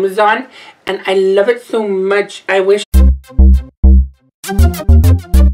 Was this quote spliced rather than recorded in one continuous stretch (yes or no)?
no